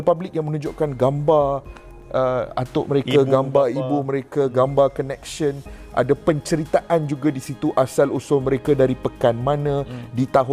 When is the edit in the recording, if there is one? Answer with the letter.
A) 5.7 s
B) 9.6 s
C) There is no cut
C